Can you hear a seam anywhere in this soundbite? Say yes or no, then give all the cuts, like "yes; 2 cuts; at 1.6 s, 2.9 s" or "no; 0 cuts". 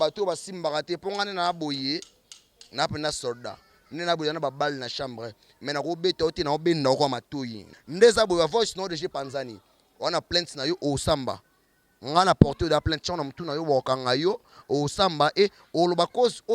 yes; 1 cut; at 7.8 s